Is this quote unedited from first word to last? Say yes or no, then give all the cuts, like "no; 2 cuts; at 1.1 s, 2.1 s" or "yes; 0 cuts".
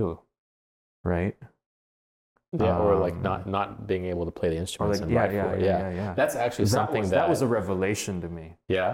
yes; 0 cuts